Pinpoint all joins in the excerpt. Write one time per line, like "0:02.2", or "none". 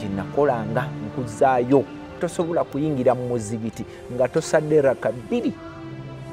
0:02.2